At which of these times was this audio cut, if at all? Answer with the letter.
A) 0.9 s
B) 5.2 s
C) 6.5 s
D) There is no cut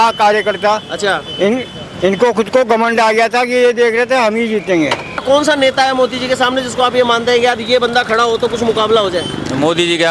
B